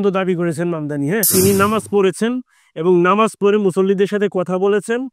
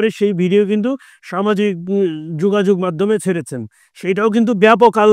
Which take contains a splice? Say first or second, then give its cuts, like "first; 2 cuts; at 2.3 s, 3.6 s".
first; 1 cut; at 1.3 s